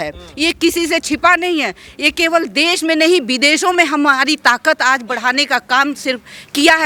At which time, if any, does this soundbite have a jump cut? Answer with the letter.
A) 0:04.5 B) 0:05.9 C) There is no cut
C